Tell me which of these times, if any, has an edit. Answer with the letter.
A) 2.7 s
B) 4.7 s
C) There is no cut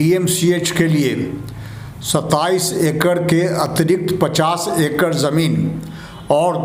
C